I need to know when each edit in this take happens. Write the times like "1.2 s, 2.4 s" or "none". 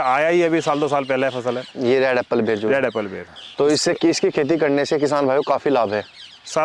none